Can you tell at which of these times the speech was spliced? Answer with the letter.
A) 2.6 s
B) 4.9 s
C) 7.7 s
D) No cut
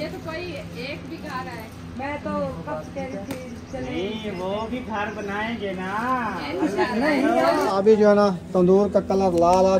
C